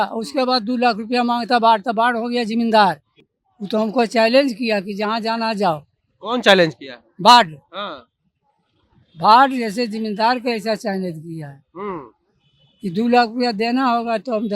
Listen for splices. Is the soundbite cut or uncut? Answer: cut